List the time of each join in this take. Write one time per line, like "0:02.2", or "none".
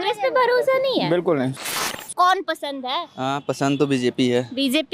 0:01.7